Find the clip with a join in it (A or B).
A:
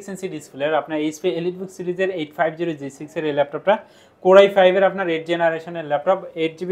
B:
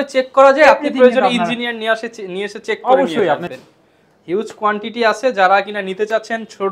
B